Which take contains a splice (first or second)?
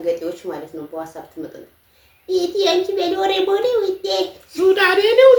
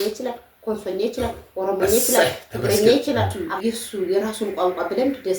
second